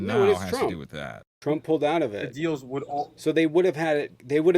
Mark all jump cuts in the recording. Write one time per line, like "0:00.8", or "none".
0:01.2